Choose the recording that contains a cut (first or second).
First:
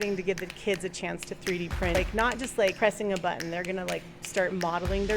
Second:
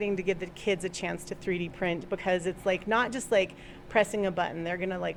first